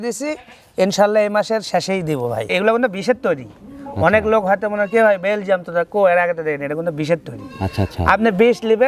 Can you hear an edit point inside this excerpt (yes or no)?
yes